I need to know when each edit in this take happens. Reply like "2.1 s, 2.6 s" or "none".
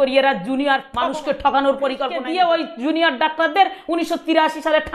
0.9 s, 2.2 s